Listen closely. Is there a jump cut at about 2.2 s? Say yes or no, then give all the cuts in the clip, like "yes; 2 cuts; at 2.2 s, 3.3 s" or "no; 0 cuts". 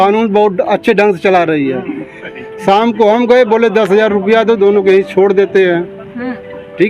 yes; 1 cut; at 2.2 s